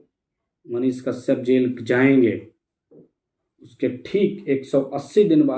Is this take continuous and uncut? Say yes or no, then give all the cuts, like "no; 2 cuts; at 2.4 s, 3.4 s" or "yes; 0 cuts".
yes; 0 cuts